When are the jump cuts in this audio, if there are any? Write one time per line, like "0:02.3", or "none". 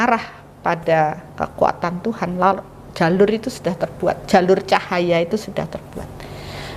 none